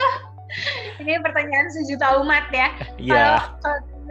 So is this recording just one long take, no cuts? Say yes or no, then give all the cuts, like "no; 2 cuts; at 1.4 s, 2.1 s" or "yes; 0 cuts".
yes; 0 cuts